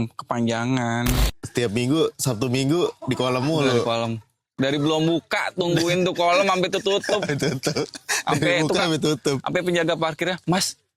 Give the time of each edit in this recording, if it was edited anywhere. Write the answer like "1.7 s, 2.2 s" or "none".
1.3 s